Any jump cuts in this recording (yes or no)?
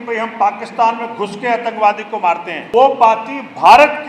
yes